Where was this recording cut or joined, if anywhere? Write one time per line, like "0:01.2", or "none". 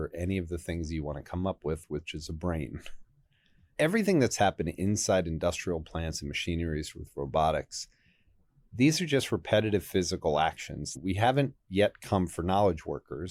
0:03.7
0:11.0